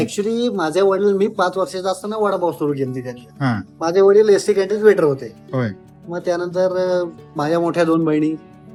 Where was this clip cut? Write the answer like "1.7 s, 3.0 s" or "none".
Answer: none